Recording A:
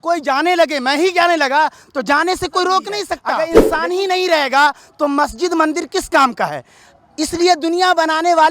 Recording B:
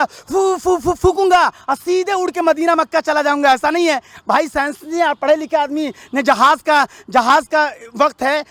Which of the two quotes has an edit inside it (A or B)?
A